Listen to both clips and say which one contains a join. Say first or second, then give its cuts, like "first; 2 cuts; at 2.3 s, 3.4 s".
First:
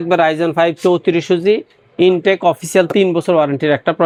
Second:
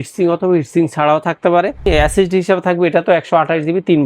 second; 1 cut; at 1.8 s